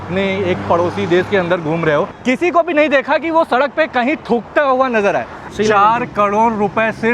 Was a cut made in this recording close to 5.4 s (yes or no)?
yes